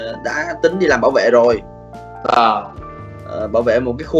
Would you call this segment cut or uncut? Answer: uncut